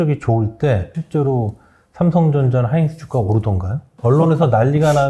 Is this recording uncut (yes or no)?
no